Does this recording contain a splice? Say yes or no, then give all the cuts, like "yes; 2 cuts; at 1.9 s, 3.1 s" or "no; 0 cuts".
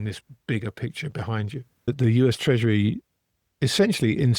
yes; 1 cut; at 1.9 s